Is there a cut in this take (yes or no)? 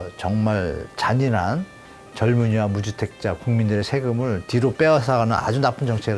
no